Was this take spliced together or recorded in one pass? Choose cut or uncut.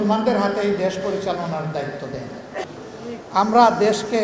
cut